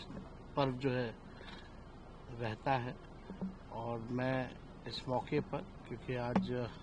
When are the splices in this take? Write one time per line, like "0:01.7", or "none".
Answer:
none